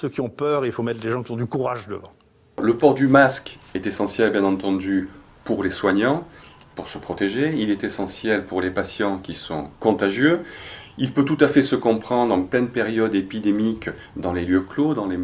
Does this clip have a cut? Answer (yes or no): no